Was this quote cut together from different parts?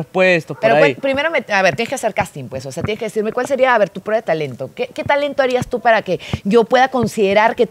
no; 0 cuts

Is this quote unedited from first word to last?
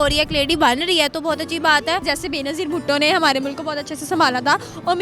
no; 1 cut; at 2.0 s

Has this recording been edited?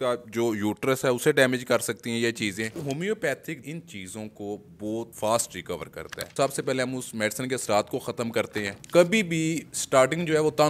yes; 5 cuts; at 2.8 s, 3.6 s, 5.1 s, 6.3 s, 8.6 s

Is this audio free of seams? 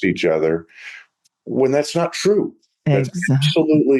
yes; 0 cuts

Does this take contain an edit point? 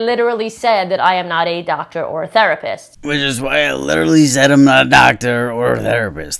no; 0 cuts

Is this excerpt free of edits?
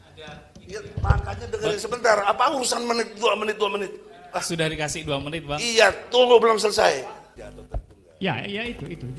no; 1 cut; at 7.4 s

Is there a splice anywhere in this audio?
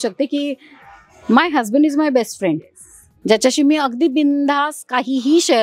no; 0 cuts

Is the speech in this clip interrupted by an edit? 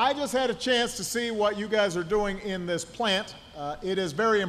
yes; 1 cut; at 2.9 s

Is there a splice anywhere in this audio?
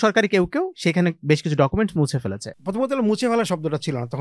yes; 1 cut; at 2.5 s

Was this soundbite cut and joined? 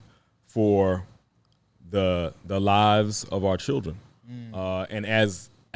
no; 0 cuts

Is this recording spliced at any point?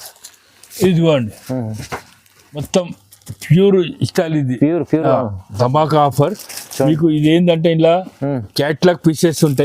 yes; 1 cut; at 2.7 s

